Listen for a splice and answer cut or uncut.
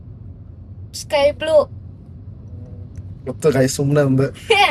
uncut